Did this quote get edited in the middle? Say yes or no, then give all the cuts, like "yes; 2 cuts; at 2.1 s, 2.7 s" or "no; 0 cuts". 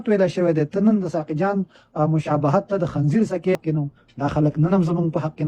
yes; 1 cut; at 3.5 s